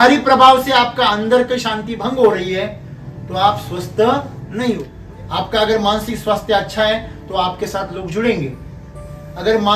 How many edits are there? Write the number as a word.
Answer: one